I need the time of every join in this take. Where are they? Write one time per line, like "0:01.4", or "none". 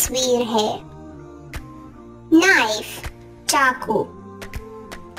none